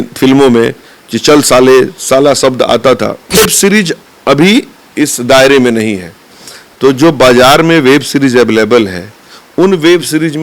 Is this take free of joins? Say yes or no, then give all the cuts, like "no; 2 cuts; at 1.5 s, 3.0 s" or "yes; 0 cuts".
no; 1 cut; at 3.4 s